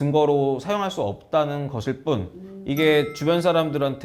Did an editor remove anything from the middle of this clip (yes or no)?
no